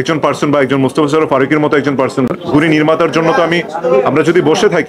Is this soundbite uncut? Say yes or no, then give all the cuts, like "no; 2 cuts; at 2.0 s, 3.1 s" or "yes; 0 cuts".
no; 1 cut; at 2.3 s